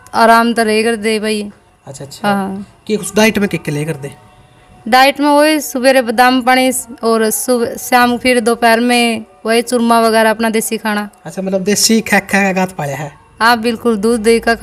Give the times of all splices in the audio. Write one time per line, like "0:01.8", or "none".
none